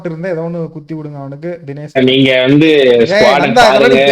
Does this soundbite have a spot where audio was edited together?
yes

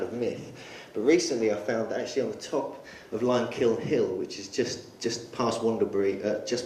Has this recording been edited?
yes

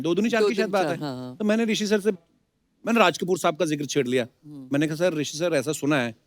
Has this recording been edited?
no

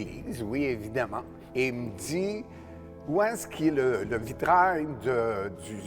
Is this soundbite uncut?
no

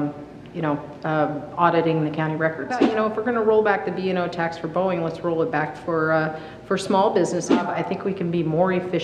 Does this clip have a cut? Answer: yes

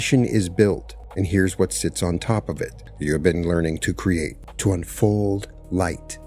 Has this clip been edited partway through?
yes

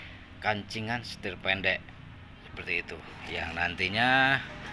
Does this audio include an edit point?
no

